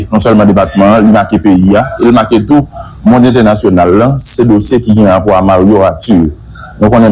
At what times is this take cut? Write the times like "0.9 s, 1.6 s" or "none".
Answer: none